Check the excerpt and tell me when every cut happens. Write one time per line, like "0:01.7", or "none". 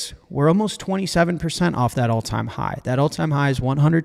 none

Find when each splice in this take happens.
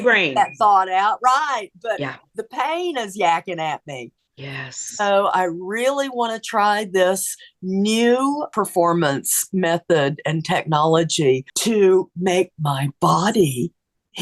0:08.5
0:11.5

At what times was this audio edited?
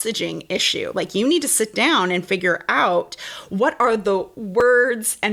none

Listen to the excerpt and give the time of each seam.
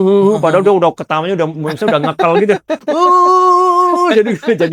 none

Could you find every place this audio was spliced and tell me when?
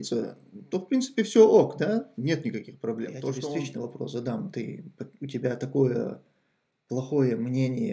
0:03.5

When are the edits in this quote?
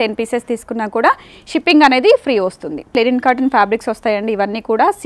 0:02.9

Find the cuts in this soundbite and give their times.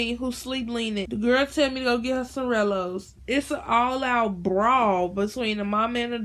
0:01.1

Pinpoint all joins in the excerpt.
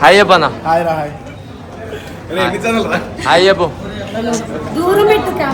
none

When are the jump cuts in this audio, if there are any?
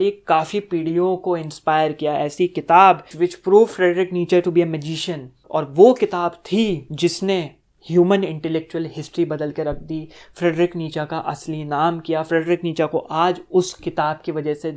0:03.1
0:06.9

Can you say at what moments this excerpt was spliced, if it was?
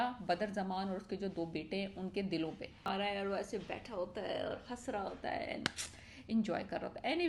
0:02.9

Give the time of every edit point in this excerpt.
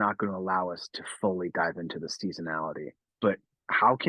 0:03.0

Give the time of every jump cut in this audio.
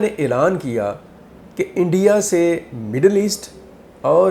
none

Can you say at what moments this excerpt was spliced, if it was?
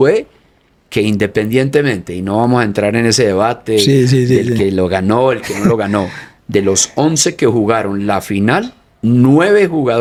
none

